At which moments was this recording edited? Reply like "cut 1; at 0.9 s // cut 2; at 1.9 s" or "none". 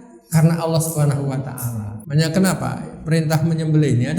cut 1; at 2.0 s